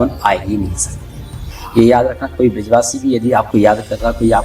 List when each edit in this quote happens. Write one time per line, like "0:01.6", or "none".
0:01.6